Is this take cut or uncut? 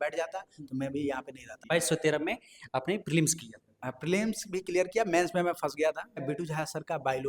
cut